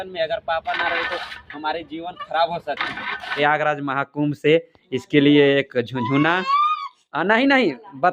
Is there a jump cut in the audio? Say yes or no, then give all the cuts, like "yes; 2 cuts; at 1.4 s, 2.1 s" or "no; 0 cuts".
yes; 1 cut; at 3.4 s